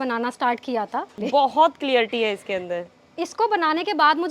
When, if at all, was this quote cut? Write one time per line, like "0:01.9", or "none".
0:01.1